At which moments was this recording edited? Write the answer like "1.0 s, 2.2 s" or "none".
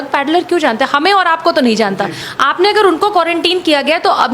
2.2 s